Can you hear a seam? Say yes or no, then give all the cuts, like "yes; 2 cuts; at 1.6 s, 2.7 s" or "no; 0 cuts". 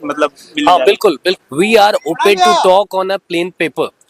yes; 1 cut; at 1.4 s